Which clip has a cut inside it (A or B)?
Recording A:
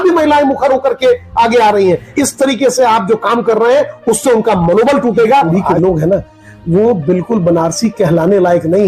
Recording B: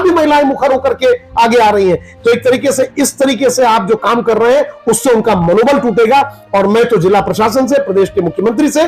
A